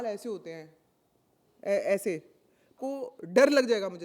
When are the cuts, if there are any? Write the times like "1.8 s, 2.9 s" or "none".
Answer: 2.7 s